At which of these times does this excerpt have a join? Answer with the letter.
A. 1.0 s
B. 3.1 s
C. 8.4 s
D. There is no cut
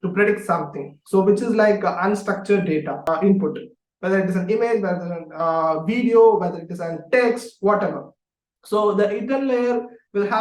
B